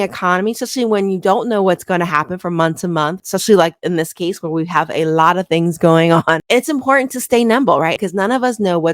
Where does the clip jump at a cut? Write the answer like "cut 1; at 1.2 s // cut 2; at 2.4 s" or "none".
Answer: cut 1; at 3.2 s // cut 2; at 6.4 s